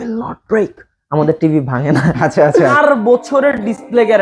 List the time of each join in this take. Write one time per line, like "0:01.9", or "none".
0:02.7

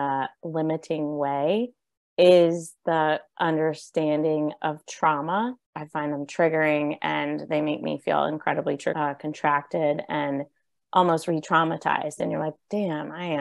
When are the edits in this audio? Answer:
0:05.9
0:09.3

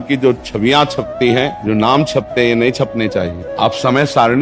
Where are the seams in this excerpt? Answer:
0:01.6
0:03.4

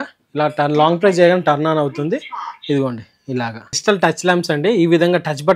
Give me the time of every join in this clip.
0:03.7

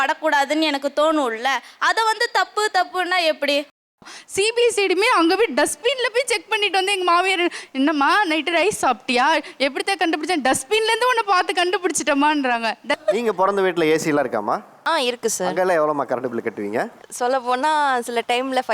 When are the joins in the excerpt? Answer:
0:04.1
0:13.0

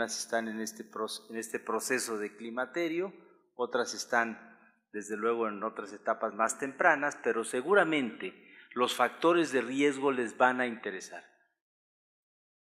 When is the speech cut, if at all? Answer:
none

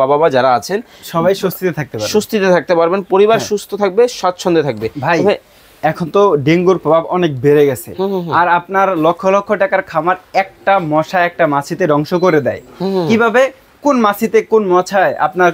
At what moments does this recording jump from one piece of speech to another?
none

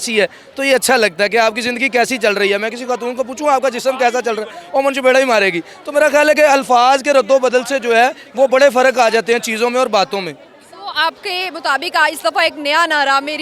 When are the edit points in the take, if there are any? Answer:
none

